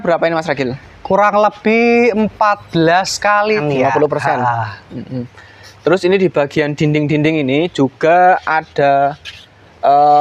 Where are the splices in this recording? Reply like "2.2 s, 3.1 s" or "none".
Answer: 3.6 s